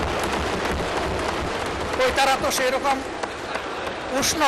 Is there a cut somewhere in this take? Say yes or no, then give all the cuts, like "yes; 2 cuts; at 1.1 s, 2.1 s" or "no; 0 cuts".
no; 0 cuts